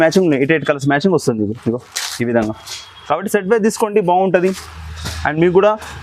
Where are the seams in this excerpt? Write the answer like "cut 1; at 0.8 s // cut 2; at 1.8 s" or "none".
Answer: none